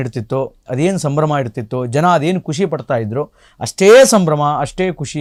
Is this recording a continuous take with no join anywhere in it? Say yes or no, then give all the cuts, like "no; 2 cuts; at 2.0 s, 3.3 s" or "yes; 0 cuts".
yes; 0 cuts